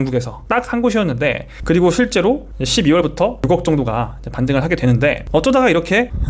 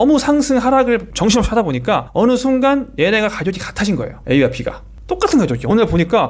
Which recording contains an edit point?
first; 3 cuts; at 1.5 s, 3.4 s, 5.2 s

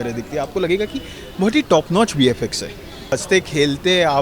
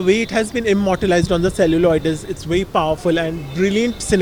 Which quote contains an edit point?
first; 1 cut; at 3.1 s

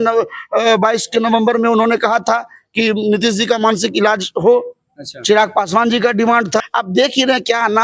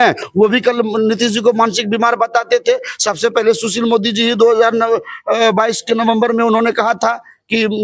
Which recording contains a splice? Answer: first; 1 cut; at 6.7 s

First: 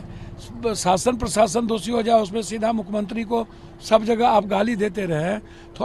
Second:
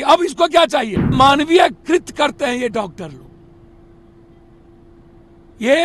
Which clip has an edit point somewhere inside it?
second; 1 cut; at 1.1 s

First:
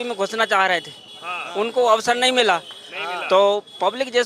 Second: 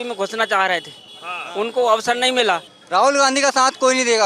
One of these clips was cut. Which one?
second; 1 cut; at 2.7 s

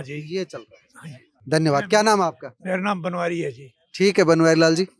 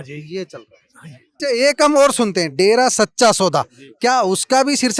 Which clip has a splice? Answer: second; 1 cut; at 1.4 s

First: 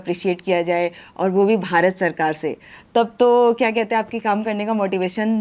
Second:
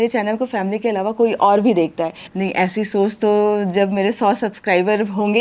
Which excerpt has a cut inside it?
second; 1 cut; at 2.2 s

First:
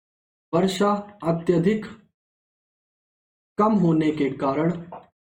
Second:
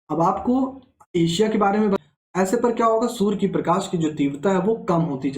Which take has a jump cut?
second; 1 cut; at 2.0 s

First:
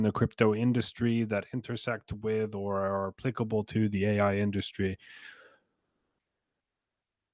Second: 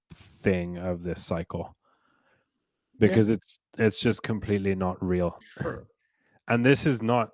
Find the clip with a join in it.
second; 1 cut; at 5.4 s

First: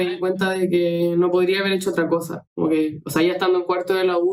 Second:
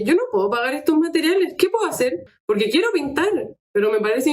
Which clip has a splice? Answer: second; 1 cut; at 2.2 s

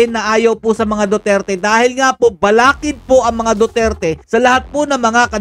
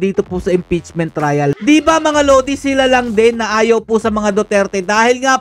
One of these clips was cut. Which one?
second; 1 cut; at 1.6 s

